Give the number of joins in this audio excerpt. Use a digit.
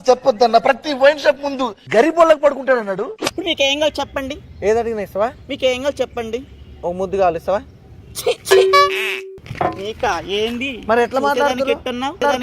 1